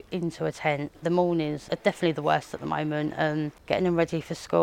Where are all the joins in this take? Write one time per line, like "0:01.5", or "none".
0:00.9
0:01.6
0:03.6